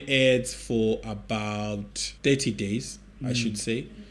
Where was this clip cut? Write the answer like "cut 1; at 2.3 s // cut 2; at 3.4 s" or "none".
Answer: cut 1; at 2.0 s